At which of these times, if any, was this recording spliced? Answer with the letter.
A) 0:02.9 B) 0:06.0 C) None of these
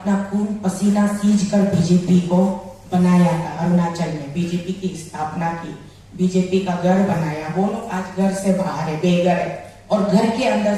C